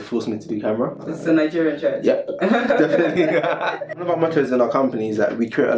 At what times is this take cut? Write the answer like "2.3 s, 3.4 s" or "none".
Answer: 1.0 s, 3.9 s